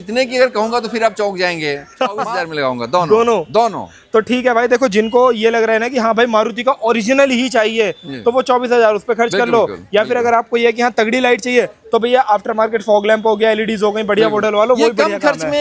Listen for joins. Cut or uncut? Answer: uncut